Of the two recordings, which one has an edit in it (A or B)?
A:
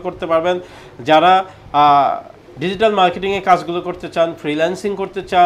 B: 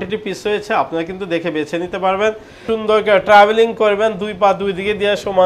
B